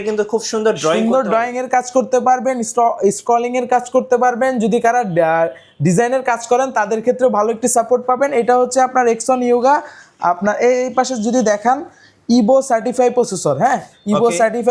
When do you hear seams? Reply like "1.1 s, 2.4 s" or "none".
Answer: none

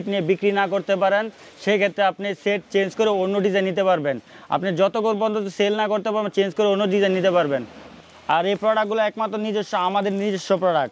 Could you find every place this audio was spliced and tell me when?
none

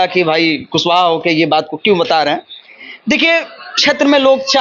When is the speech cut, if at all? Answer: none

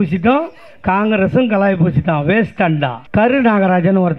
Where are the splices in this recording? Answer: 3.0 s

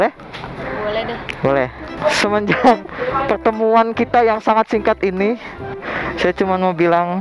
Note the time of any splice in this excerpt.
1.9 s, 5.8 s

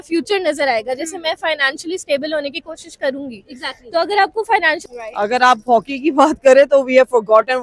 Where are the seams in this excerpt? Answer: 4.9 s

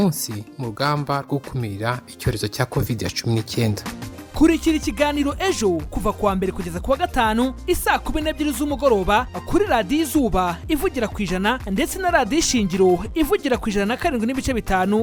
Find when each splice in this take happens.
none

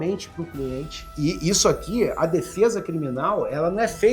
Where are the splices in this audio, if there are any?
1.0 s

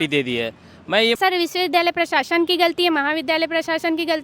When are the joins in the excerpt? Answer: 1.2 s

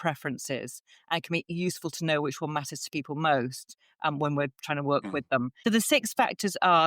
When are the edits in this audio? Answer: 5.5 s

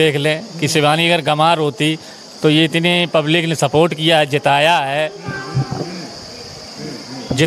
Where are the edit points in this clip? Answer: none

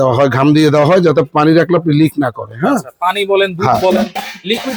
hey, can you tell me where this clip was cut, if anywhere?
none

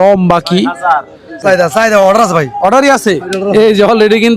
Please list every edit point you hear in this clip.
1.4 s

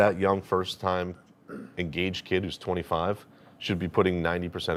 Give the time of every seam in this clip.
none

